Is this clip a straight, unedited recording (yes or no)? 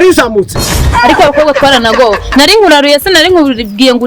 no